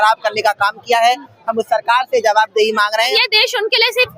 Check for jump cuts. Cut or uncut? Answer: cut